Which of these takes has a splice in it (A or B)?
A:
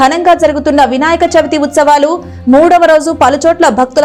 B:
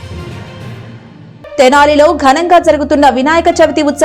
B